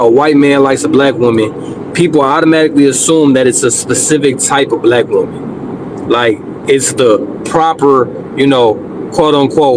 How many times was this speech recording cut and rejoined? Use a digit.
0